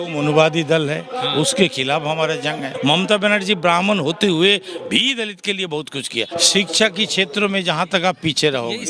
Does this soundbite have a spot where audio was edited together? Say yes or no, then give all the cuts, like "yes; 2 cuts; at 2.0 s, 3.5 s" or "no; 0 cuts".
yes; 2 cuts; at 2.7 s, 6.3 s